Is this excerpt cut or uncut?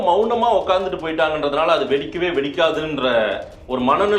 uncut